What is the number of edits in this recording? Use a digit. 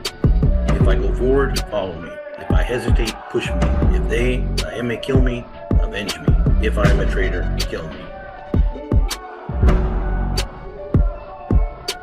1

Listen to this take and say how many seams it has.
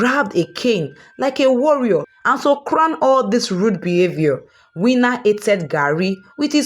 1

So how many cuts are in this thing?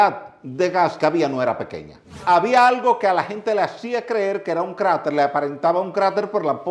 1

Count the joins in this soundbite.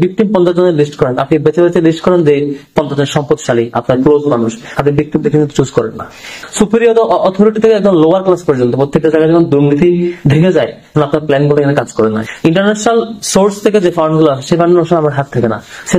2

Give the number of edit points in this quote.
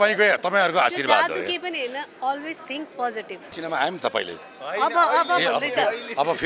1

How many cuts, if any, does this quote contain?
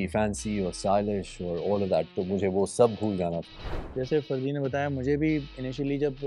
1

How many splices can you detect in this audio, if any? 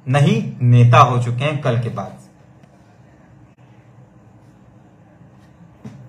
0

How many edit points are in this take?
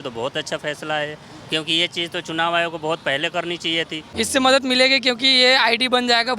1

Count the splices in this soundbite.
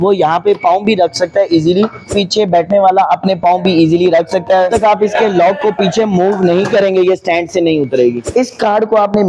3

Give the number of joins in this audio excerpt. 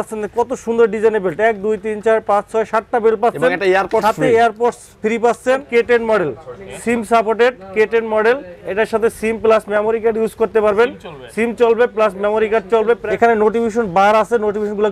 2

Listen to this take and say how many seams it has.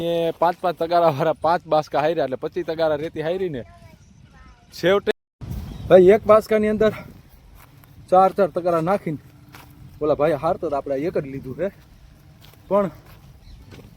1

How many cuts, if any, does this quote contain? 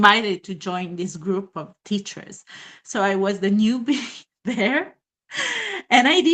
0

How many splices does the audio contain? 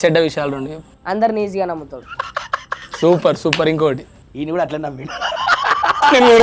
1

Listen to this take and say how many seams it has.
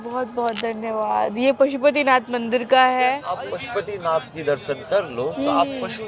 1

